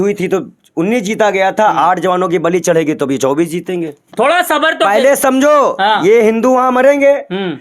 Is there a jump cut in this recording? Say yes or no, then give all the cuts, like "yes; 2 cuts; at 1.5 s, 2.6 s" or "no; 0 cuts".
yes; 1 cut; at 4.0 s